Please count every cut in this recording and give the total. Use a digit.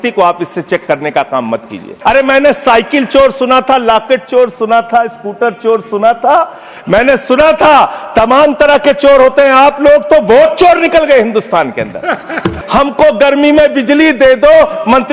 2